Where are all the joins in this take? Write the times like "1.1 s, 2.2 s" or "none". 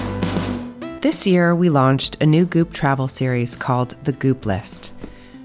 0.9 s